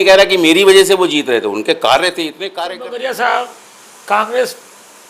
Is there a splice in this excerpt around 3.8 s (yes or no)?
no